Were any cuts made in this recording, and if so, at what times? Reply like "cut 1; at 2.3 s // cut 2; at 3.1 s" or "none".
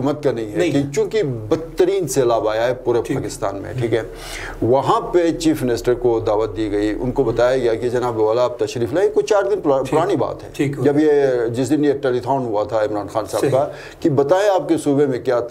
none